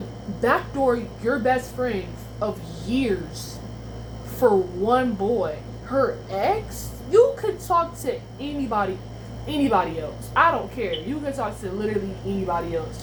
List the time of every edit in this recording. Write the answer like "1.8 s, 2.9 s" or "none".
none